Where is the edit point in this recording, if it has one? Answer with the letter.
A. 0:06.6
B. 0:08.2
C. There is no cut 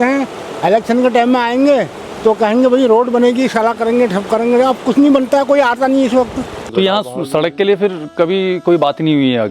A